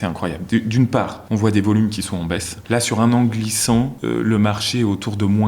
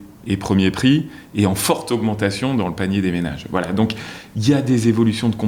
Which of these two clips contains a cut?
first; 3 cuts; at 1.2 s, 2.5 s, 4.0 s

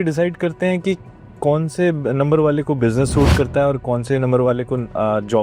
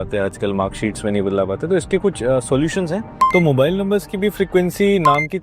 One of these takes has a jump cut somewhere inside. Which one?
second; 1 cut; at 3.1 s

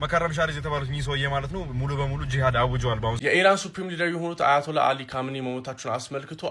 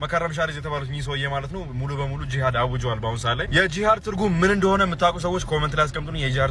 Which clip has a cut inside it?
first; 1 cut; at 3.2 s

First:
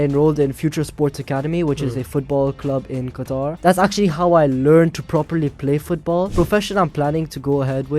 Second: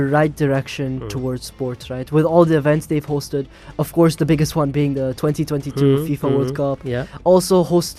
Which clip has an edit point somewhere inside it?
first; 2 cuts; at 3.5 s, 6.3 s

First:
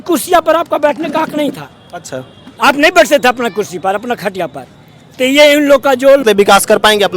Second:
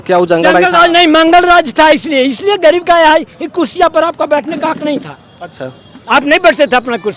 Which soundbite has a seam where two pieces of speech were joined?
first; 1 cut; at 6.2 s

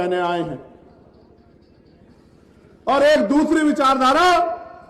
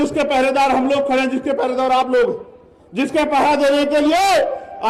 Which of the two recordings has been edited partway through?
first; 1 cut; at 1.4 s

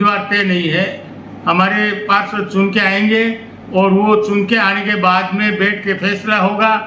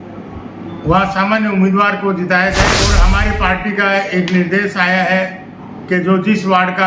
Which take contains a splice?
second; 1 cut; at 2.9 s

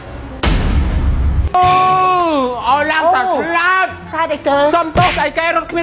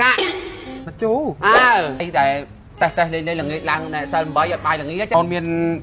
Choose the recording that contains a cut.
second; 2 cuts; at 2.1 s, 5.1 s

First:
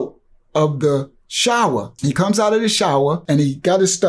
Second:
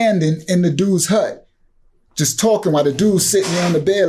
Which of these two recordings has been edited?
first; 2 cuts; at 1.9 s, 3.2 s

